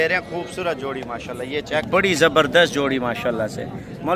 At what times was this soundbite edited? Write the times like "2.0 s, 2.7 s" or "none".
1.8 s